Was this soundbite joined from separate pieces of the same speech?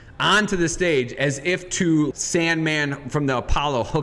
yes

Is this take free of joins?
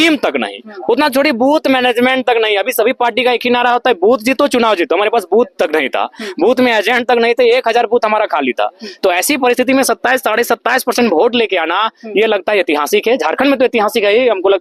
yes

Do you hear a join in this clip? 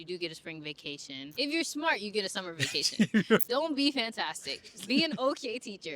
yes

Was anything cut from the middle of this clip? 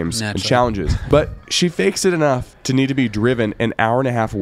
yes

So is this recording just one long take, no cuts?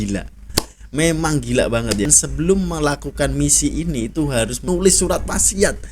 no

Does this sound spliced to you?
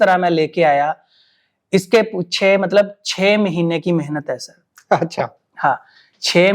no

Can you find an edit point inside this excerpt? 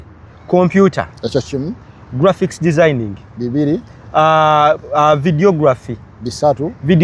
no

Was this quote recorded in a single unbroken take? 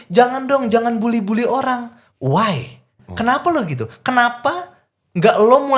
yes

